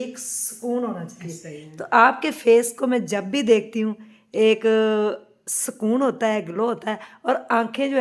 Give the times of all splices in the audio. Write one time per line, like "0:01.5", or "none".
none